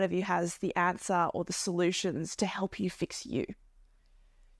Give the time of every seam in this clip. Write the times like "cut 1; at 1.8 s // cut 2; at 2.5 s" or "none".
none